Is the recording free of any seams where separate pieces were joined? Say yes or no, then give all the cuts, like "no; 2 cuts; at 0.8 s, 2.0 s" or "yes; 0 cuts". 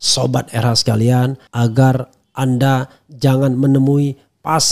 no; 1 cut; at 1.4 s